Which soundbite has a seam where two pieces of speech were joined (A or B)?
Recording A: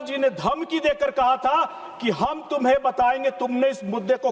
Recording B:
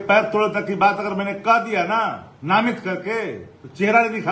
B